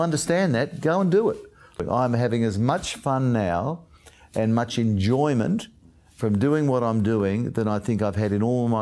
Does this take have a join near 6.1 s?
no; 1 cut; at 1.8 s

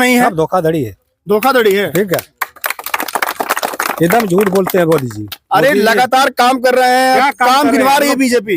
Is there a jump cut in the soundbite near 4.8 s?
no; 0 cuts

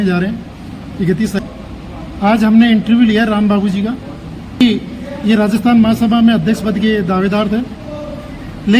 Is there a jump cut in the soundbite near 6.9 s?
no; 2 cuts; at 1.4 s, 4.6 s

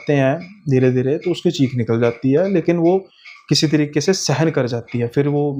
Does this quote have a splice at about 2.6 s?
no; 0 cuts

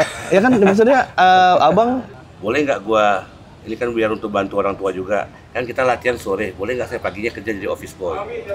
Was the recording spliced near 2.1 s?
yes; 1 cut; at 2.1 s

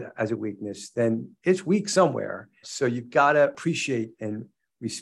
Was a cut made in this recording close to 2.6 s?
yes; 2 cuts; at 2.6 s, 3.6 s

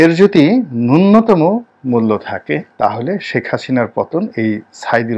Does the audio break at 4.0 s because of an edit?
no; 1 cut; at 2.7 s

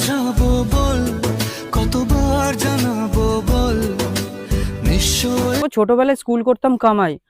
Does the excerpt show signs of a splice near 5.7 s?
yes; 1 cut; at 5.7 s

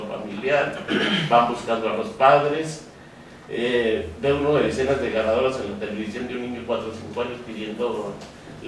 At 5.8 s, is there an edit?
no; 0 cuts

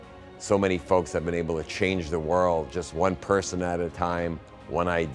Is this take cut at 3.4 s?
no; 0 cuts

